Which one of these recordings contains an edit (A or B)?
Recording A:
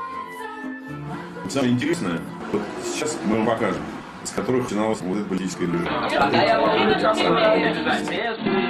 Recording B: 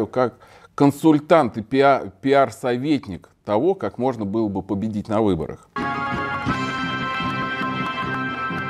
B